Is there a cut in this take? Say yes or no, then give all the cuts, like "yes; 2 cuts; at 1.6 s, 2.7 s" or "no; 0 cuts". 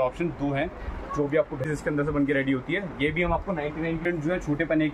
yes; 2 cuts; at 1.7 s, 4.0 s